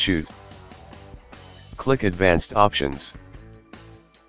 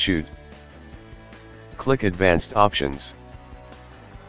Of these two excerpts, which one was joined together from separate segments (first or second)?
second